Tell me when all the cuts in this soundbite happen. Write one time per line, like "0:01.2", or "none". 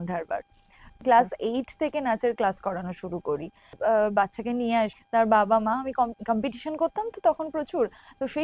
0:01.0
0:03.8
0:04.9